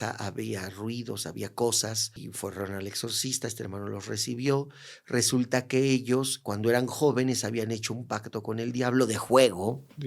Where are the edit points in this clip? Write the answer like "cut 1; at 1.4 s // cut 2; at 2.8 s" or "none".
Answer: cut 1; at 2.2 s